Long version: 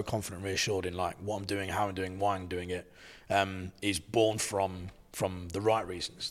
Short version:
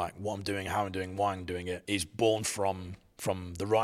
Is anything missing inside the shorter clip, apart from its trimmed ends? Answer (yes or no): yes